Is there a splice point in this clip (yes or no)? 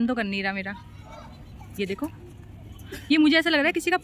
no